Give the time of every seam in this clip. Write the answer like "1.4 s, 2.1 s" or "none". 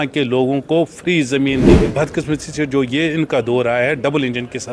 1.9 s